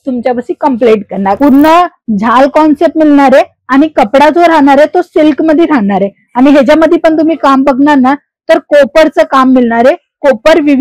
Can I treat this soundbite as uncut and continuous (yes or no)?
no